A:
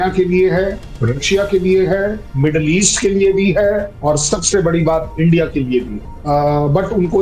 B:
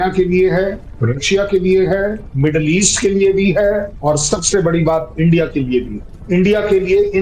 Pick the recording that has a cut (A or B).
A